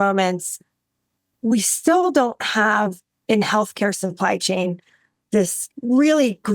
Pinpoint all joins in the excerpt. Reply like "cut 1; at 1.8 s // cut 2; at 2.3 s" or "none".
cut 1; at 5.6 s